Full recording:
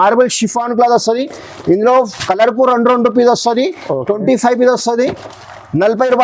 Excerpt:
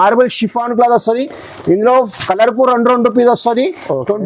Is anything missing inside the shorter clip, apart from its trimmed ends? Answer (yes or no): no